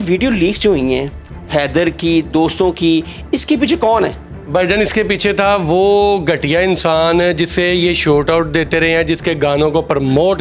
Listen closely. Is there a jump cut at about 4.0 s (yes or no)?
no